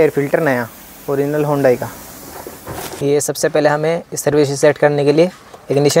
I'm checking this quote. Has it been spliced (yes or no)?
yes